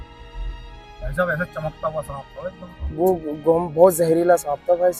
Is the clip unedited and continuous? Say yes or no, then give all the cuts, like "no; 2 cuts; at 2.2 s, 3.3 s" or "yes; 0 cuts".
yes; 0 cuts